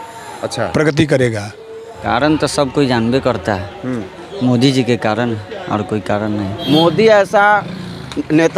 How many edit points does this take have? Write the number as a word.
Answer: two